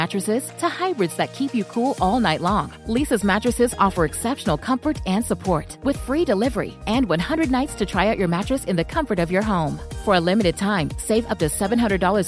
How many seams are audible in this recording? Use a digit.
0